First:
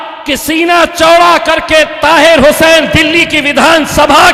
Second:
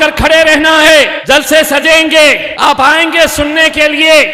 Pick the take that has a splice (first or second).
second